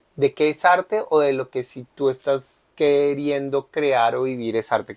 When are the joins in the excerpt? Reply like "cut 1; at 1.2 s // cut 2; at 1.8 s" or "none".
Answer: cut 1; at 2.6 s